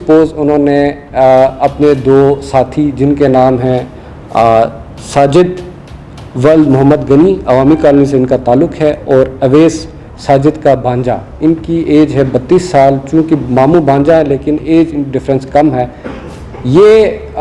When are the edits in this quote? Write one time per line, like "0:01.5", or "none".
none